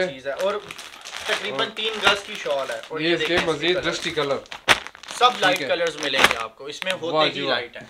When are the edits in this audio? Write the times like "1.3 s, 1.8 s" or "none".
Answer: none